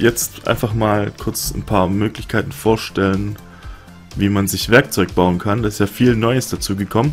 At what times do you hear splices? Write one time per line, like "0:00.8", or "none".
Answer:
0:04.9